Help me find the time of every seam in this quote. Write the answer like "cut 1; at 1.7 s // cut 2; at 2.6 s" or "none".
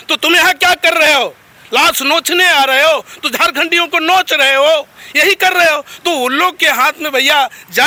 none